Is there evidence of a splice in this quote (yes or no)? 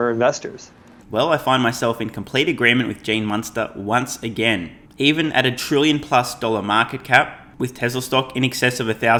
no